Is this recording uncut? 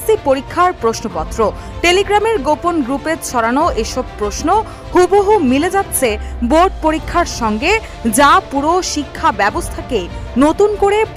yes; 0 cuts

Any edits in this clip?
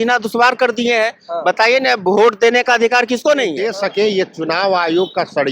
yes; 1 cut; at 3.6 s

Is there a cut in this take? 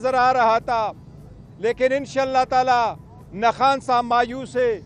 no; 0 cuts

